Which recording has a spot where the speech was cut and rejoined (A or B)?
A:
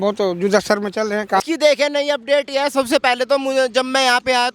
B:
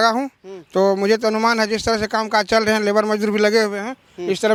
A